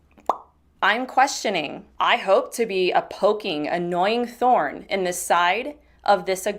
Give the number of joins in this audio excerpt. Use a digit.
1